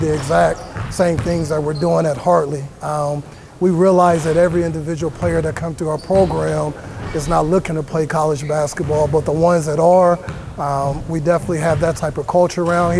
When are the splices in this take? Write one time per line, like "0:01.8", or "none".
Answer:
none